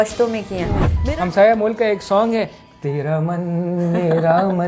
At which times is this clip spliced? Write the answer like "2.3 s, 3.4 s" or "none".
0.9 s